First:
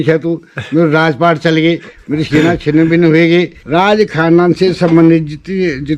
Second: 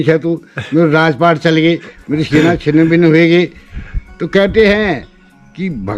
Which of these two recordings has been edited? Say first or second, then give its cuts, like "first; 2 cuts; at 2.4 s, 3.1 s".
first; 1 cut; at 3.6 s